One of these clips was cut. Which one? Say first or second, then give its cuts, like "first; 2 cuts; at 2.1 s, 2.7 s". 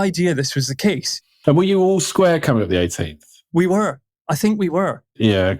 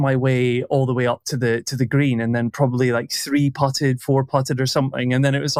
first; 2 cuts; at 1.5 s, 3.6 s